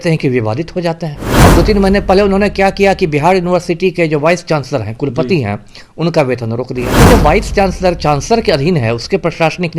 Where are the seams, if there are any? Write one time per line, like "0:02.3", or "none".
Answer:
0:01.2
0:06.9